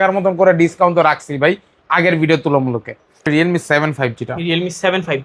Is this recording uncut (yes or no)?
no